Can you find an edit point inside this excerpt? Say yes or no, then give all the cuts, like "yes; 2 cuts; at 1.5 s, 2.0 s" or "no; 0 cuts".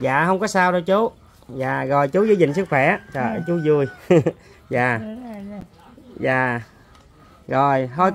no; 0 cuts